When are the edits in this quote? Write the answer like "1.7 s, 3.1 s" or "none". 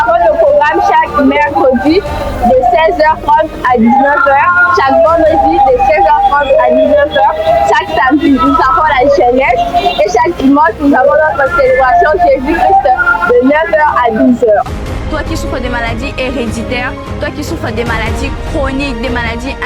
none